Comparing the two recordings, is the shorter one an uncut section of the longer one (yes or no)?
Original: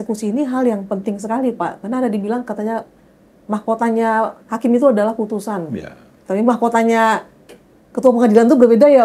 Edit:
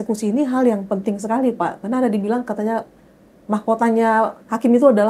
yes